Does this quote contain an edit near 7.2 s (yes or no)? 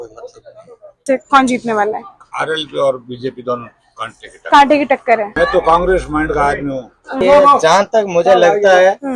yes